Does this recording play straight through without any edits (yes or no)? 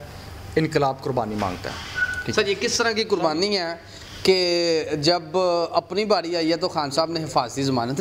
yes